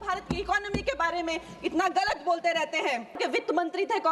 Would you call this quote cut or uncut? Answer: cut